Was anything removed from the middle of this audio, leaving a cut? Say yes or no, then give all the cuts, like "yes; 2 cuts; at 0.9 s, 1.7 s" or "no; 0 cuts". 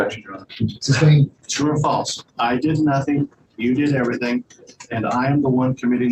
yes; 1 cut; at 1.4 s